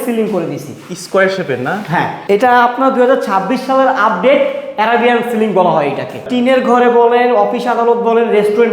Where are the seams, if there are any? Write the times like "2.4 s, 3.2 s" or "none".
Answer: 2.2 s, 6.2 s